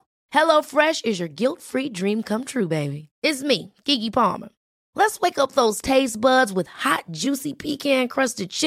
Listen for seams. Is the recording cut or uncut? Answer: uncut